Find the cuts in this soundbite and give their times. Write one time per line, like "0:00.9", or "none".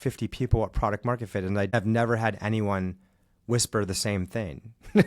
0:01.7